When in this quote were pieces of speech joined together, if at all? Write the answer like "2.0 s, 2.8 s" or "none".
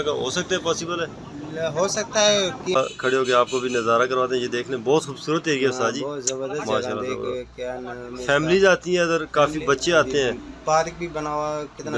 2.7 s